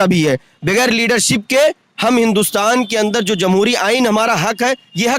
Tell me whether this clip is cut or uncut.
uncut